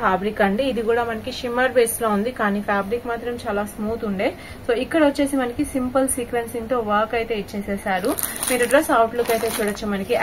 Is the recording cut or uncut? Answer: uncut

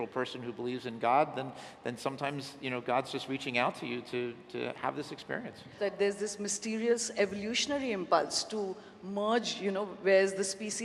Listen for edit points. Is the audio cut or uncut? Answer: cut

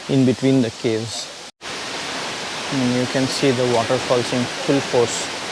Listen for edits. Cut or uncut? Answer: cut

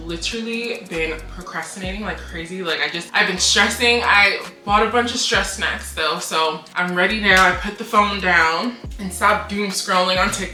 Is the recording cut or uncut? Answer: uncut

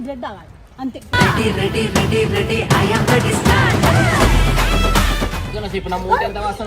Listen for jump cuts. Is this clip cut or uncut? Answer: cut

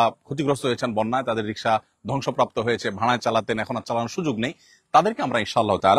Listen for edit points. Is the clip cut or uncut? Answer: uncut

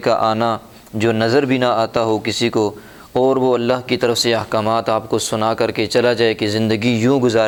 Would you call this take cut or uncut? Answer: uncut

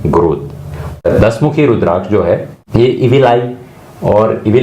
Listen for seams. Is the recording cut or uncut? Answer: cut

